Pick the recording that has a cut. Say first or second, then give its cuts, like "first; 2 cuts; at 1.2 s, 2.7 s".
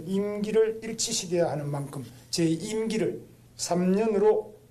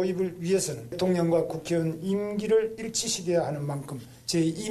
second; 1 cut; at 1.0 s